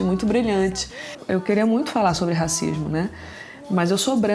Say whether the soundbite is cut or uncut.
cut